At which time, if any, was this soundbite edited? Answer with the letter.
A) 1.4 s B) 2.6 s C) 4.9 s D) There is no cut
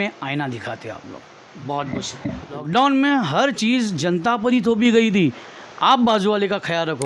B